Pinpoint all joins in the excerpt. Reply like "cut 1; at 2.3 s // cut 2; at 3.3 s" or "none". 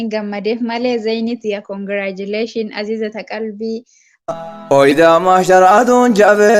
cut 1; at 4.2 s

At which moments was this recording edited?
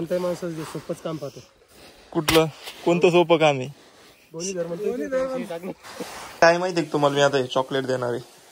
cut 1; at 6.3 s

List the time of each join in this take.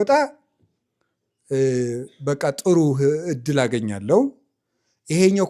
none

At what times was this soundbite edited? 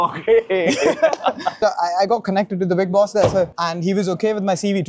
cut 1; at 1.6 s // cut 2; at 3.5 s

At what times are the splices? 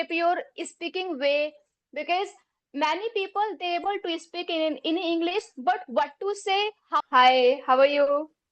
cut 1; at 6.9 s

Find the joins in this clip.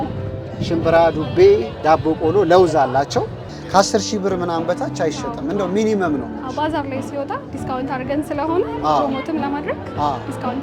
cut 1; at 3.5 s

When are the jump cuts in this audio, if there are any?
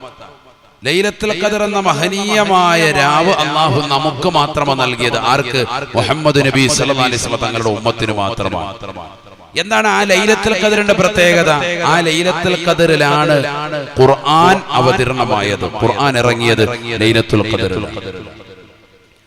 none

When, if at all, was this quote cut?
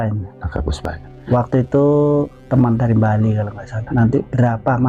cut 1; at 1.1 s // cut 2; at 2.4 s // cut 3; at 3.8 s

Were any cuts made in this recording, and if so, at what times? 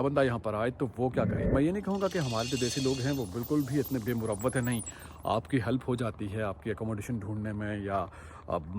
cut 1; at 1.5 s

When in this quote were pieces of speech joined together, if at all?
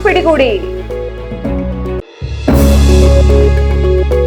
none

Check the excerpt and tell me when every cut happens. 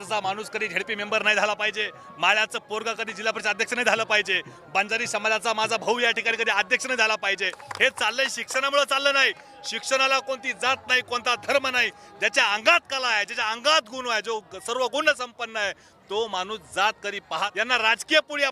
cut 1; at 7.6 s // cut 2; at 17.5 s

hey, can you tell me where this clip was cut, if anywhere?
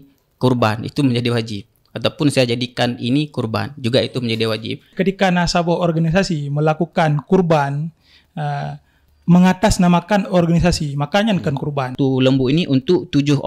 cut 1; at 4.9 s // cut 2; at 11.9 s

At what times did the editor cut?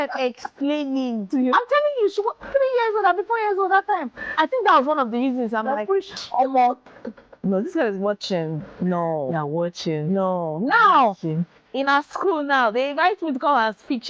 cut 1; at 1.3 s // cut 2; at 4.3 s

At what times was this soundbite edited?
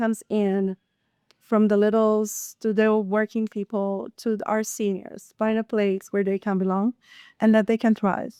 none

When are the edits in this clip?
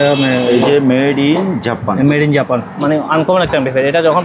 cut 1; at 2.7 s

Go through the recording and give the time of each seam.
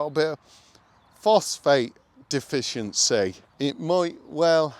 cut 1; at 3.4 s

